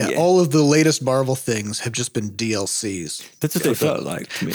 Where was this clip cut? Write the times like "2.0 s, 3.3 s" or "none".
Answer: none